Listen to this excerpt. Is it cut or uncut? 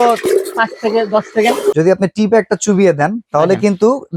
cut